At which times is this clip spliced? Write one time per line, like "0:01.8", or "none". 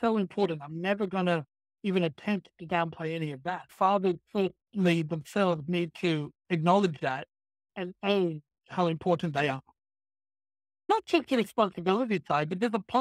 0:03.7
0:10.9